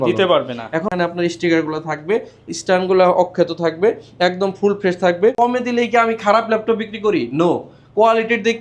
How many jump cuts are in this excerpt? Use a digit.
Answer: 2